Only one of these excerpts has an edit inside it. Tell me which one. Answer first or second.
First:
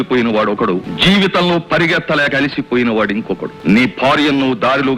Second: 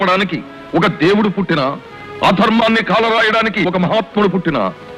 first